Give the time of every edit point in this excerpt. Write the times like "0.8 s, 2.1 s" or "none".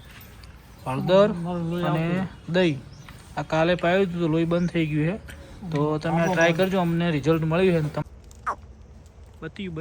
8.0 s